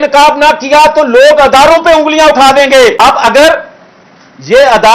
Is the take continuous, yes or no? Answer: no